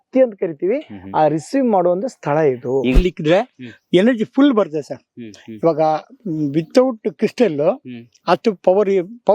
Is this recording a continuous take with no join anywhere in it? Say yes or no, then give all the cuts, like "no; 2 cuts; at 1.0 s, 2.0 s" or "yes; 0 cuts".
no; 1 cut; at 3.0 s